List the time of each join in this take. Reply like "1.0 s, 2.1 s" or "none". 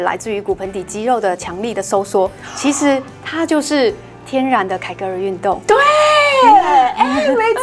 none